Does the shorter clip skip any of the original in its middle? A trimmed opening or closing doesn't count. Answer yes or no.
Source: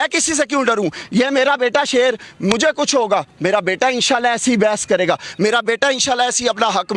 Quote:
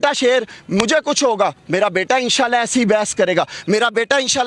no